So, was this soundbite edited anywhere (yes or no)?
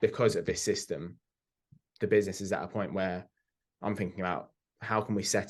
no